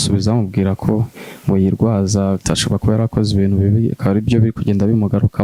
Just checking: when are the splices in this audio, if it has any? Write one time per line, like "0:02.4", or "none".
none